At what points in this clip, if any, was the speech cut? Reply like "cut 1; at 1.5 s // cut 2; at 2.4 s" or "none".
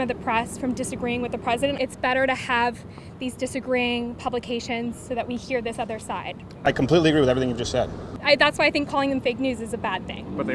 cut 1; at 1.8 s // cut 2; at 8.1 s